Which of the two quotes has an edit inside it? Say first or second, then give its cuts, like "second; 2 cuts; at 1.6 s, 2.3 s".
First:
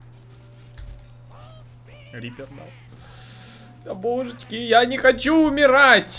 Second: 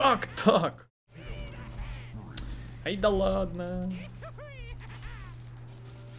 second; 1 cut; at 1.0 s